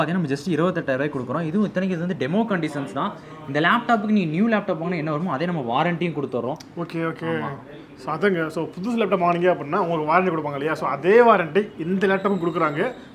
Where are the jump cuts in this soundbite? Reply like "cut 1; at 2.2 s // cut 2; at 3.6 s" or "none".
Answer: none